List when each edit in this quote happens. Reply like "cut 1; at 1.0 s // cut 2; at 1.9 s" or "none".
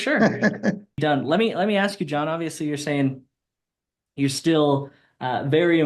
cut 1; at 1.0 s